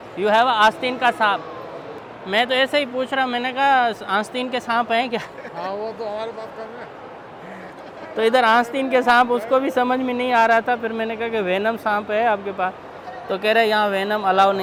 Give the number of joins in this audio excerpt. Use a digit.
0